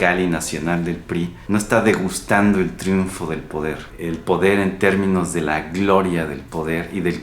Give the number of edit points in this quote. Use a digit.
2